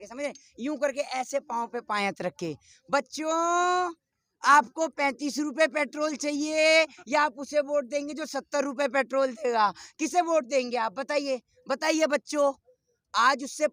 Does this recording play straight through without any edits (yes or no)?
yes